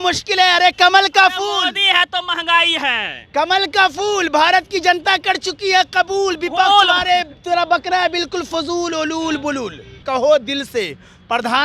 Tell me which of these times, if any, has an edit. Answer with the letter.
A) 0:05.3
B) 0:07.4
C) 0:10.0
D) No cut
C